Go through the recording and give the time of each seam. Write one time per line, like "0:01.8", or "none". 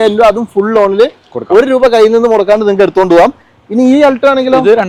none